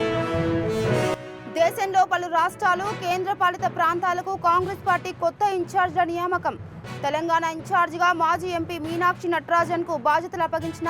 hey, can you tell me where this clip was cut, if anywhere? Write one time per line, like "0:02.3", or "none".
none